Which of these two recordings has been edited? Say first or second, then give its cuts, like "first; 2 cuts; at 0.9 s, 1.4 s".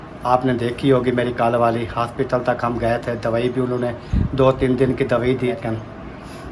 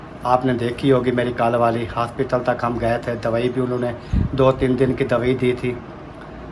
first; 1 cut; at 5.6 s